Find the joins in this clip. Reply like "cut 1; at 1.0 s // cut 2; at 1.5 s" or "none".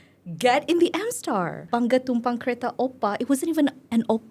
cut 1; at 1.7 s